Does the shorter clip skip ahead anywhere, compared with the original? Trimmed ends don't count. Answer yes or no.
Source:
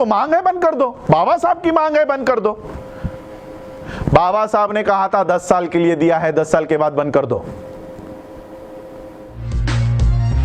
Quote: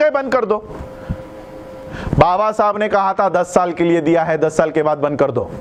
no